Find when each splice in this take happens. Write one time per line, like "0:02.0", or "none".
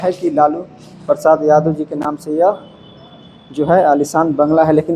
none